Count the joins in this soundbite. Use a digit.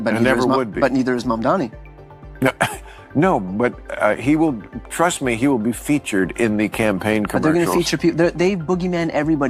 0